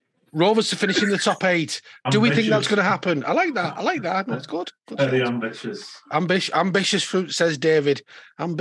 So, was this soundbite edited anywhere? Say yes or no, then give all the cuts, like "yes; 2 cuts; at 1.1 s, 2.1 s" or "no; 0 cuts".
no; 0 cuts